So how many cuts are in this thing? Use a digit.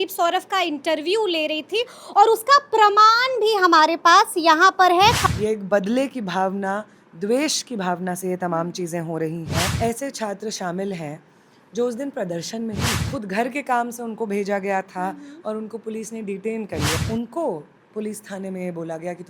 4